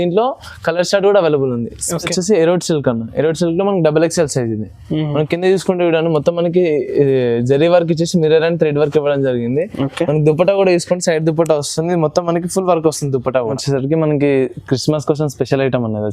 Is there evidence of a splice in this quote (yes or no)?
yes